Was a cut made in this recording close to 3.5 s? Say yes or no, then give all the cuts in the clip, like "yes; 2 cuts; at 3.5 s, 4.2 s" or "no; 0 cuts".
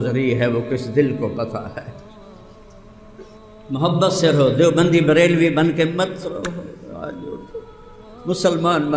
yes; 1 cut; at 3.5 s